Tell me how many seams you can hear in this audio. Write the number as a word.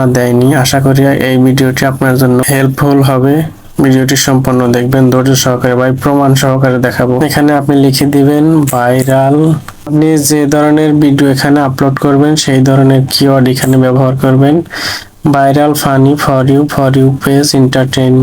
two